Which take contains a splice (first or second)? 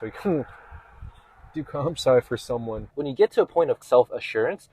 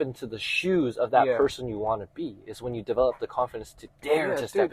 first